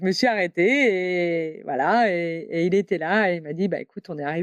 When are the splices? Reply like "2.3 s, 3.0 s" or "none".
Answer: none